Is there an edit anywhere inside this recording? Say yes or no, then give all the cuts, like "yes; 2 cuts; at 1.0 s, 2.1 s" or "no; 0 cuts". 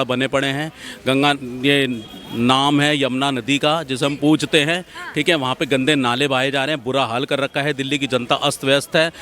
no; 0 cuts